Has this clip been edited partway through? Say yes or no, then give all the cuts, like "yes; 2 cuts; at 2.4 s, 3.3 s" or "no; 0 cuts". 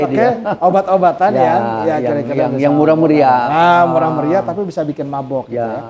no; 0 cuts